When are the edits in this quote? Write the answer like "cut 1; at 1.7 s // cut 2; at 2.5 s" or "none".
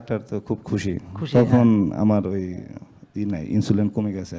none